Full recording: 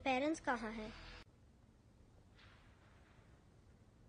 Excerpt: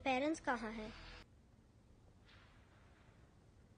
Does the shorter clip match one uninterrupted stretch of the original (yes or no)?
no